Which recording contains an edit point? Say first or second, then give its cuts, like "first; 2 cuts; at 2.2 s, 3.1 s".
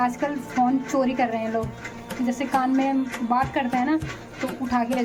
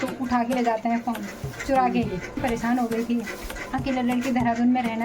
second; 1 cut; at 2.4 s